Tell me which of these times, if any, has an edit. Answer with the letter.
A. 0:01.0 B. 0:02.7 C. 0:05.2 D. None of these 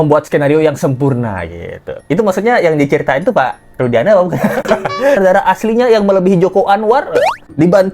C